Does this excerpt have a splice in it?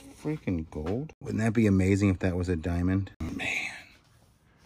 yes; 2 cuts; at 1.2 s, 3.3 s

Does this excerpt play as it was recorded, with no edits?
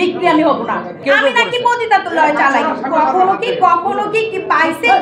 no; 1 cut; at 1.0 s

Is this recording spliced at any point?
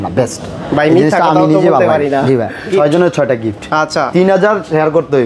yes; 1 cut; at 2.6 s

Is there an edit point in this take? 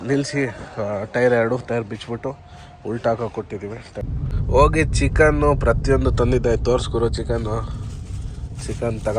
yes; 1 cut; at 3.9 s

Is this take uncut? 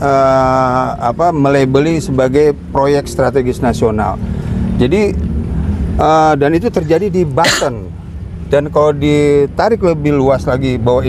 yes; 0 cuts

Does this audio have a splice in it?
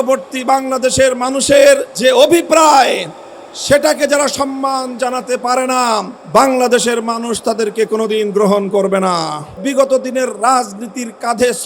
yes; 3 cuts; at 1.9 s, 6.1 s, 9.6 s

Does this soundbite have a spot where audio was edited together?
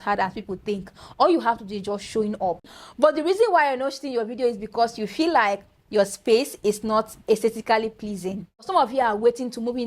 yes; 2 cuts; at 2.7 s, 8.7 s

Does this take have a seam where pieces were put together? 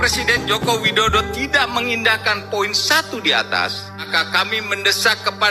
yes; 1 cut; at 4.1 s

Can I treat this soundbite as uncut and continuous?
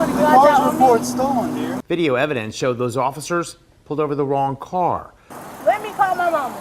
no; 2 cuts; at 1.8 s, 5.2 s

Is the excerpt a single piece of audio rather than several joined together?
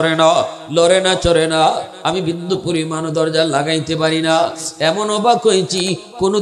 yes; 0 cuts

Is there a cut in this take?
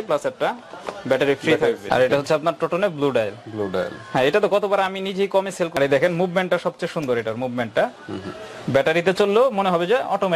yes; 2 cuts; at 1.9 s, 5.8 s

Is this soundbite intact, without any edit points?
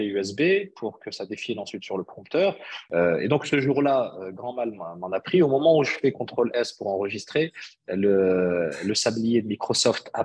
no; 1 cut; at 2.7 s

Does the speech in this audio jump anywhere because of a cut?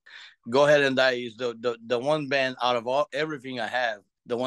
no; 0 cuts

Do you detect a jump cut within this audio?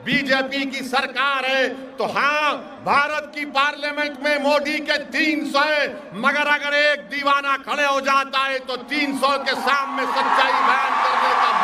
no; 0 cuts

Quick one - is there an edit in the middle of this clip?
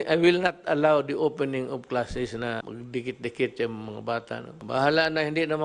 yes; 2 cuts; at 2.6 s, 4.5 s

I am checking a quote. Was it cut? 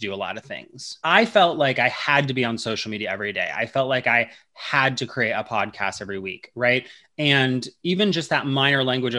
yes; 1 cut; at 1.0 s

